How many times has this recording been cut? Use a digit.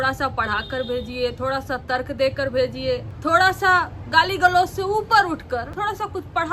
2